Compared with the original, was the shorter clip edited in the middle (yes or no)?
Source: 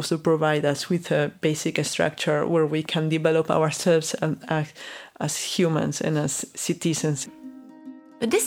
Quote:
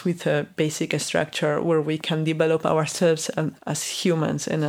yes